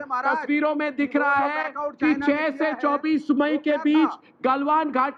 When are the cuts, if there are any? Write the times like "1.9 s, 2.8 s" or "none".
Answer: none